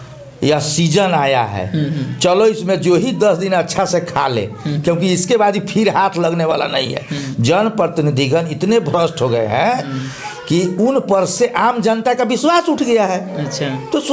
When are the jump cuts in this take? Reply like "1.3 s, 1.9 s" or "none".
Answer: none